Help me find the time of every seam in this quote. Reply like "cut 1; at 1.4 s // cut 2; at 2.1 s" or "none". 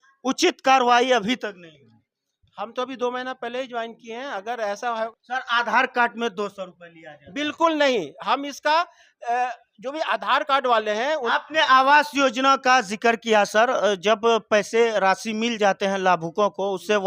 cut 1; at 5.1 s // cut 2; at 11.3 s